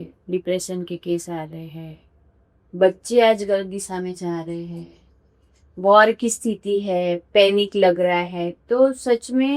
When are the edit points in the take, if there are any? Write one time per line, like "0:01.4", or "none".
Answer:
none